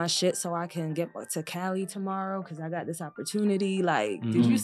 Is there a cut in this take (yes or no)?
no